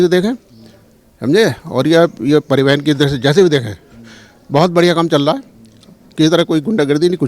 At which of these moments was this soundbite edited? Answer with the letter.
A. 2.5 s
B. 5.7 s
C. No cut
C